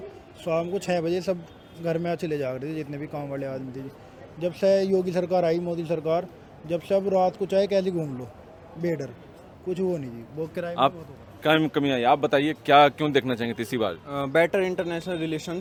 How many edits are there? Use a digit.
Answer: 0